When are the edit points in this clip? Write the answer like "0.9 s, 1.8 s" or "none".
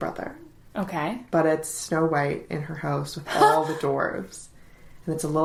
none